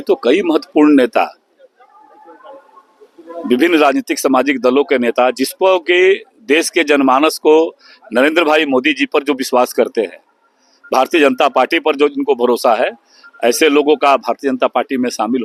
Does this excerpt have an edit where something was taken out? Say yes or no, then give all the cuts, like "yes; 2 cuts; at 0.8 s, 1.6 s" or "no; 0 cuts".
no; 0 cuts